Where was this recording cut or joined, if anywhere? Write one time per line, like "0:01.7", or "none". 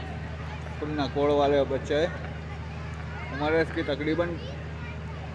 none